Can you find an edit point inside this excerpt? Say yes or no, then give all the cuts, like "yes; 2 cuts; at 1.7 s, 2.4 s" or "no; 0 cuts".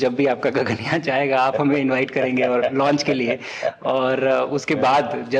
no; 0 cuts